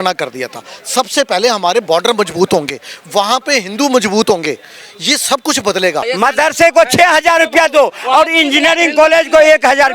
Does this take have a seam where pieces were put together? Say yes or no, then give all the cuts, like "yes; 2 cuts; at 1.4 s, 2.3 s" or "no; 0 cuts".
yes; 1 cut; at 6.0 s